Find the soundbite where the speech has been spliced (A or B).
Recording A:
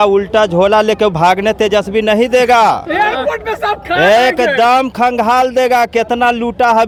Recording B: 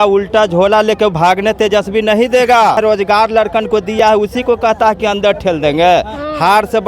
B